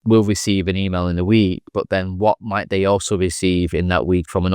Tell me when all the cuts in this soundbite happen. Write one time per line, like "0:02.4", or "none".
none